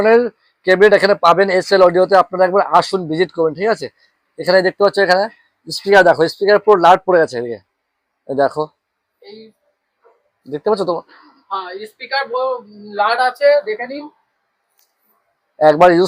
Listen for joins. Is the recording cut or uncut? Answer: uncut